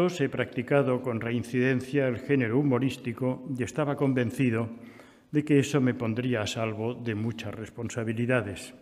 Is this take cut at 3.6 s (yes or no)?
no